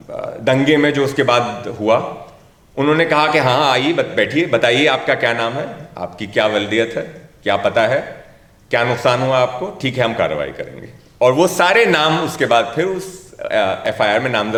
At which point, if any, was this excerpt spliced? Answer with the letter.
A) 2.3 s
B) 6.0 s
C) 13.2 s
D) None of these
D